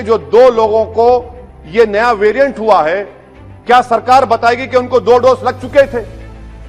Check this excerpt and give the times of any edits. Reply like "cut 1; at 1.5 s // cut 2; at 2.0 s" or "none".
none